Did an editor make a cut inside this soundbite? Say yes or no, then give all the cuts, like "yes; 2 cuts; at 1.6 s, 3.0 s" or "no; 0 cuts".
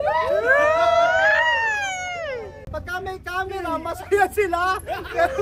yes; 1 cut; at 2.6 s